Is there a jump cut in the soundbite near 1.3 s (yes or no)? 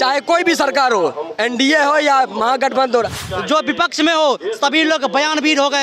no